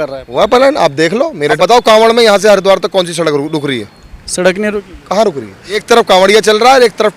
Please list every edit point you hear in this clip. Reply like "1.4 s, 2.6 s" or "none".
1.5 s, 5.8 s